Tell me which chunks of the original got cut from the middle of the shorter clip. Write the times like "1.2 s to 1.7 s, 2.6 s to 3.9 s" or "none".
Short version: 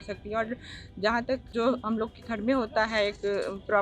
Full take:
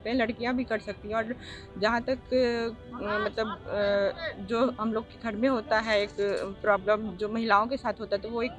2.2 s to 4.4 s